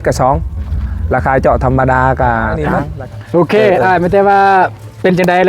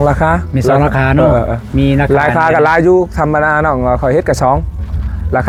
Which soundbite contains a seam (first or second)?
first